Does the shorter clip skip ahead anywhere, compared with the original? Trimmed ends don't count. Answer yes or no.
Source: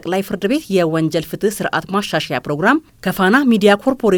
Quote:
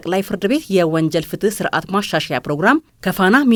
no